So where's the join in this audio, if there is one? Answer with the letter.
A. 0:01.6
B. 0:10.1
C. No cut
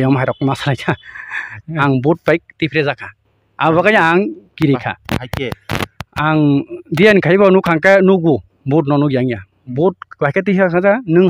A